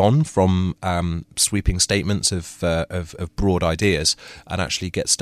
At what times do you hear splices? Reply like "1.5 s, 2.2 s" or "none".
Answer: none